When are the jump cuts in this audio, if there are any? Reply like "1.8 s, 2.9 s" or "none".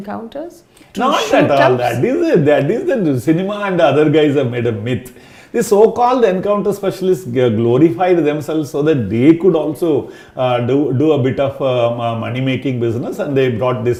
none